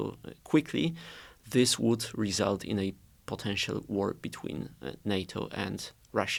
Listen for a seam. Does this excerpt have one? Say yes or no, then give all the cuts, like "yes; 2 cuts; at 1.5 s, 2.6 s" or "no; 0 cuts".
no; 0 cuts